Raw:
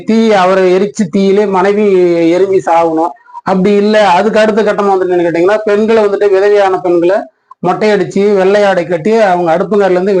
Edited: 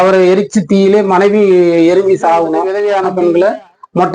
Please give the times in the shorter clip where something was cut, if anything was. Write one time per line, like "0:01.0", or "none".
0:02.7